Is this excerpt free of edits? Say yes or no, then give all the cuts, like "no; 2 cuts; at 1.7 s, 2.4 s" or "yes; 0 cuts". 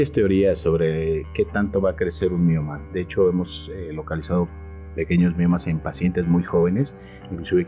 yes; 0 cuts